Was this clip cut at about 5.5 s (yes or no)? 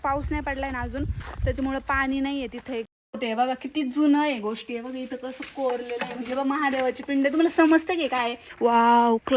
no